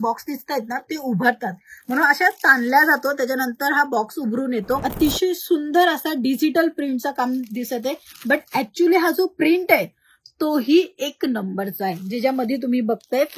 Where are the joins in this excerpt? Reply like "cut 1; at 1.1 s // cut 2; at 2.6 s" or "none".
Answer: cut 1; at 4.9 s